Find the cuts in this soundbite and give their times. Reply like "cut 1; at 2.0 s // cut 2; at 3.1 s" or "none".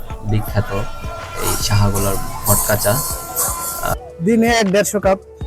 cut 1; at 3.9 s

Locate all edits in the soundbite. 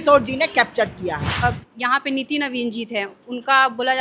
cut 1; at 1.4 s

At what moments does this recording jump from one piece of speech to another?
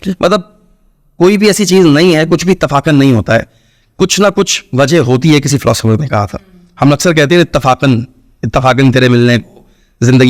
none

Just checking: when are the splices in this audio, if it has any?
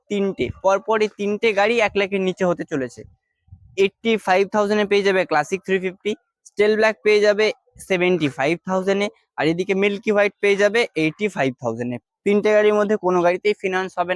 none

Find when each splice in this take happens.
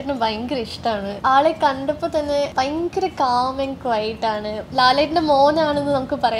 cut 1; at 1.1 s // cut 2; at 2.5 s // cut 3; at 4.6 s

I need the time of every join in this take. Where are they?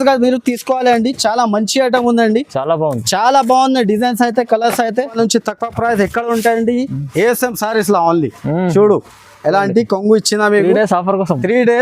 cut 1; at 5.1 s

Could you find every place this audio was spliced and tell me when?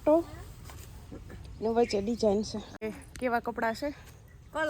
cut 1; at 2.8 s

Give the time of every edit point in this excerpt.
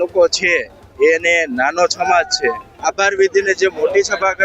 cut 1; at 2.7 s

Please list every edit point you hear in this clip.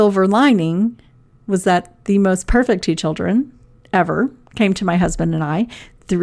none

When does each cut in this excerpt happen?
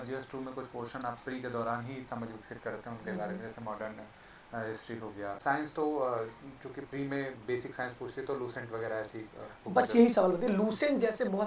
cut 1; at 5.4 s

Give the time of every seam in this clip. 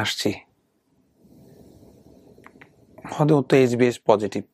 cut 1; at 1.1 s

